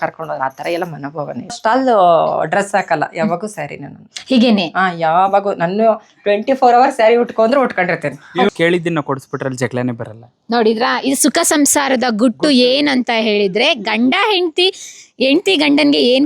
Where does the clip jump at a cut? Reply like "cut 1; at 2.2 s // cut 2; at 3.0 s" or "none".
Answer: cut 1; at 1.6 s // cut 2; at 8.5 s